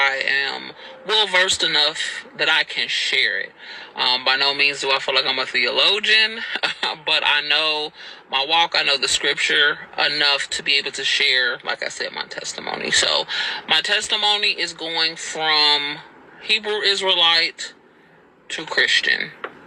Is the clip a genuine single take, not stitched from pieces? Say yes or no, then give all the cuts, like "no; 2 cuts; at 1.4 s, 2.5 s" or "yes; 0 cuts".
yes; 0 cuts